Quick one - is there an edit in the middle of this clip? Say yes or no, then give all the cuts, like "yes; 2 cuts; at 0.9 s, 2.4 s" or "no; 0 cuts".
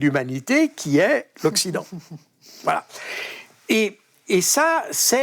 no; 0 cuts